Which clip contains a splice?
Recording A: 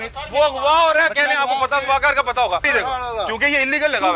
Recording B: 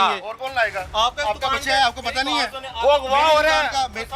A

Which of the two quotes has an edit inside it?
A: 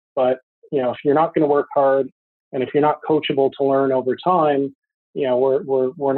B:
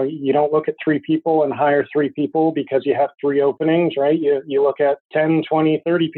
B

